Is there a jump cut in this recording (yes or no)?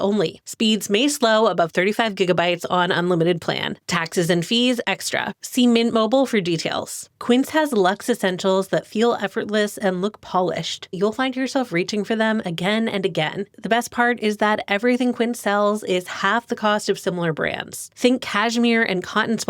yes